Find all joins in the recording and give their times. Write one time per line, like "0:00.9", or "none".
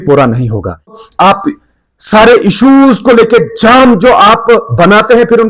0:01.0